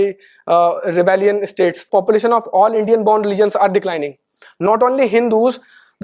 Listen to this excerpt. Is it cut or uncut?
cut